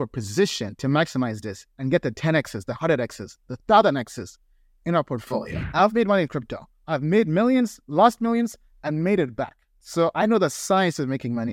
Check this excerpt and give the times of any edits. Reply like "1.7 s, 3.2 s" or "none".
5.6 s